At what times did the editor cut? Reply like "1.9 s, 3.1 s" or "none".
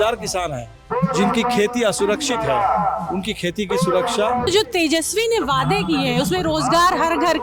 4.5 s